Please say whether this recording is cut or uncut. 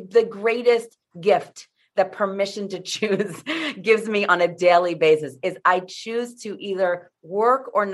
uncut